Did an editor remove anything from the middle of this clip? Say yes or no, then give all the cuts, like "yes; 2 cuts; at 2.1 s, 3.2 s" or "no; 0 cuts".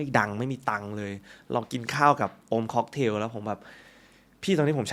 no; 0 cuts